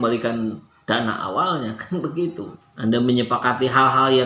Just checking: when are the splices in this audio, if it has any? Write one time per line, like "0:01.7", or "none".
0:02.5